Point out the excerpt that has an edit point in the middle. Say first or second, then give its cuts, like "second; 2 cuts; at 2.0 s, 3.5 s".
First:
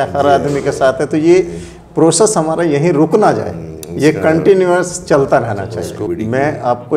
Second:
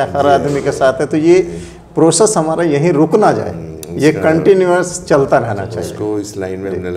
first; 1 cut; at 6.1 s